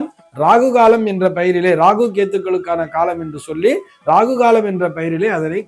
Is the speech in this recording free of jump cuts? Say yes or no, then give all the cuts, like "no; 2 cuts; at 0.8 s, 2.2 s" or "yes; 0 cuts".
yes; 0 cuts